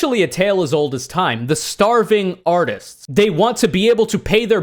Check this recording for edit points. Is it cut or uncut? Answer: cut